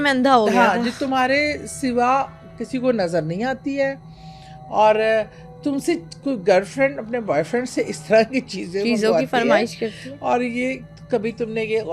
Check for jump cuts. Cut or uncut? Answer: uncut